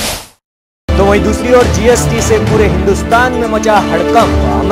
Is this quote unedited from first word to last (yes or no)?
yes